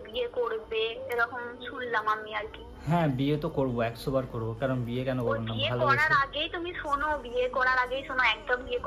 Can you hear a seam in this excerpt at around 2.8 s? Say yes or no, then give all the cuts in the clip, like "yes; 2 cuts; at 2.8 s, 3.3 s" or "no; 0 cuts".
no; 0 cuts